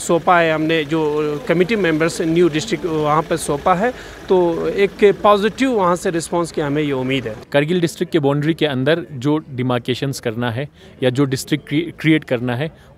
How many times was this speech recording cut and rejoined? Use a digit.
1